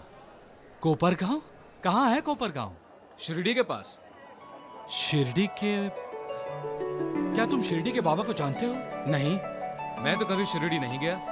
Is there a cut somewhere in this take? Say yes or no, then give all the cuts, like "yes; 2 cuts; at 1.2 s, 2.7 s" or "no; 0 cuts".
no; 0 cuts